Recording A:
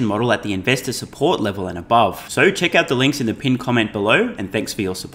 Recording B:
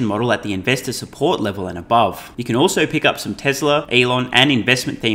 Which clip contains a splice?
B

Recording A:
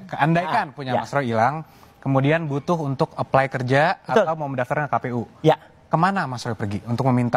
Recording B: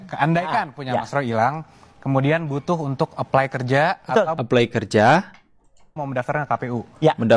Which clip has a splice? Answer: A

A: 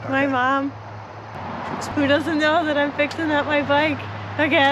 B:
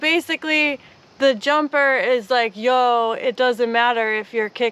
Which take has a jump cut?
A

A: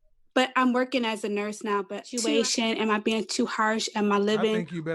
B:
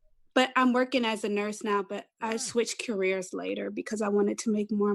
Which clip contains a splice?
A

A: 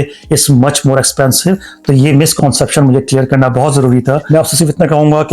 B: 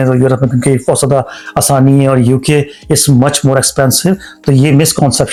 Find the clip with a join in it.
A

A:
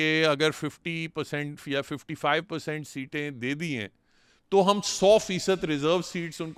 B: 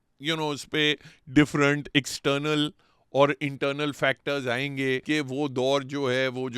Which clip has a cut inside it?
B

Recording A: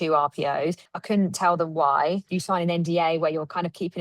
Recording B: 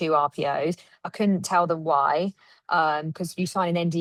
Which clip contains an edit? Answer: A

